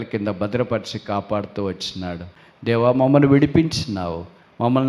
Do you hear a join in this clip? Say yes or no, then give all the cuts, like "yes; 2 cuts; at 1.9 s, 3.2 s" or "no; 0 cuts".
yes; 1 cut; at 2.2 s